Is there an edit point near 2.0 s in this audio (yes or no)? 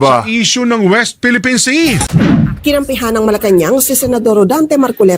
yes